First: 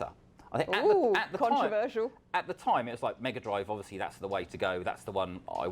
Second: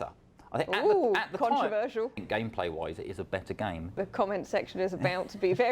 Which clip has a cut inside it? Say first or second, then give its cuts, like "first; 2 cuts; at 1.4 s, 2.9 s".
second; 2 cuts; at 2.2 s, 4.0 s